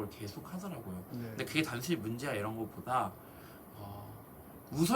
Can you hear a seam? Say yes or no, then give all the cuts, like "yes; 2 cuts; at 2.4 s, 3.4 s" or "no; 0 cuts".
no; 0 cuts